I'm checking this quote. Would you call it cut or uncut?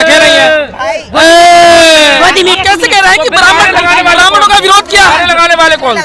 cut